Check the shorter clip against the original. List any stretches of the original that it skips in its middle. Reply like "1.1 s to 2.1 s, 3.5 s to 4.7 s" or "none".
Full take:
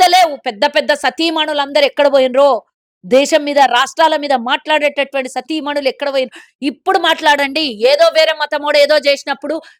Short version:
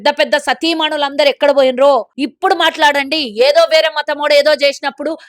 2.8 s to 6.6 s